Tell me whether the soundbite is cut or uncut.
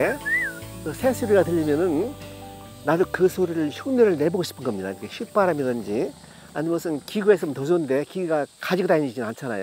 uncut